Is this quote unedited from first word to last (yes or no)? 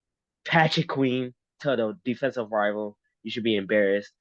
yes